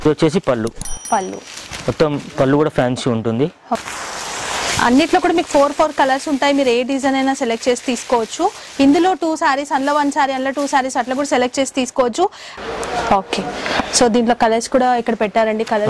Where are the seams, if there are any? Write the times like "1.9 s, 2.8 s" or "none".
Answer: 3.8 s, 12.5 s